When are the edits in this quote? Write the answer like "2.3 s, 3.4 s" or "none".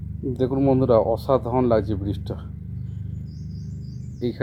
none